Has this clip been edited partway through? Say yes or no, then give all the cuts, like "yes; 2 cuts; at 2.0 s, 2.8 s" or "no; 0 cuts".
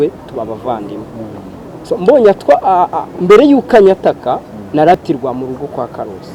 yes; 1 cut; at 5.0 s